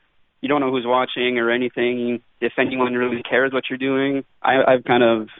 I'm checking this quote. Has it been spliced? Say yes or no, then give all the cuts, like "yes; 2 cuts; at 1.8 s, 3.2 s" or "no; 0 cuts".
yes; 1 cut; at 4.3 s